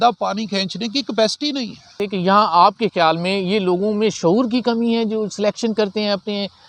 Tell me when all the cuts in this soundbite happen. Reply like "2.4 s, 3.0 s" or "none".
2.0 s